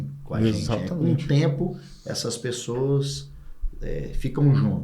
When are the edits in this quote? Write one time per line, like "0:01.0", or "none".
none